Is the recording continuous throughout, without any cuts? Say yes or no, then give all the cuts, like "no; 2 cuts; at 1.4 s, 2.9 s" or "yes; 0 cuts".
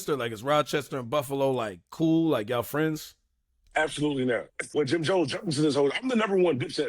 no; 1 cut; at 4.6 s